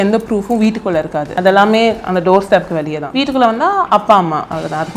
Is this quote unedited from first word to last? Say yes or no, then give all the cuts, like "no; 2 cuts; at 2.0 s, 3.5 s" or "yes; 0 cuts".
no; 2 cuts; at 1.2 s, 3.0 s